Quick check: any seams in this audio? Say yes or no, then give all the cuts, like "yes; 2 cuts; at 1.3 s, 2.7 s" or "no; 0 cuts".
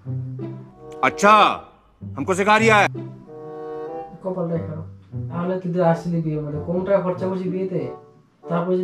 yes; 1 cut; at 5.4 s